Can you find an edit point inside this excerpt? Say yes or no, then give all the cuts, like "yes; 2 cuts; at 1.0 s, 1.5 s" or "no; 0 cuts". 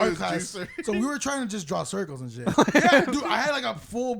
yes; 1 cut; at 2.5 s